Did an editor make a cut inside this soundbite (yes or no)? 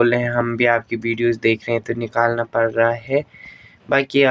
no